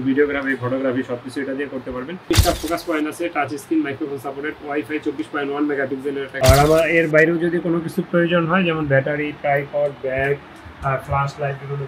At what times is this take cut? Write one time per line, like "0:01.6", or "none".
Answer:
0:02.3
0:06.3